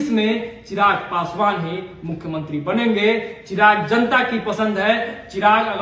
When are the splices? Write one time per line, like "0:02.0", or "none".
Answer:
none